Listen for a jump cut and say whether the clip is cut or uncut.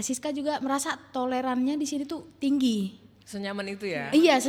uncut